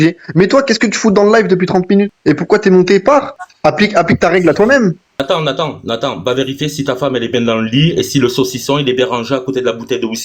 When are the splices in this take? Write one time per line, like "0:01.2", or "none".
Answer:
0:02.1
0:03.4
0:05.2